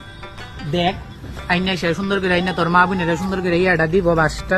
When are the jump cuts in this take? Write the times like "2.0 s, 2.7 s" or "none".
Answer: none